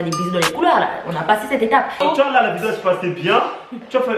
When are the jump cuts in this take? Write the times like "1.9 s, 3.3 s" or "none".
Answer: 2.0 s